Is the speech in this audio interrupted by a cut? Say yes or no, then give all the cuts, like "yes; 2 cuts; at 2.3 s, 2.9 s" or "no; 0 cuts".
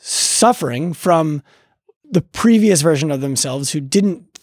yes; 1 cut; at 2.0 s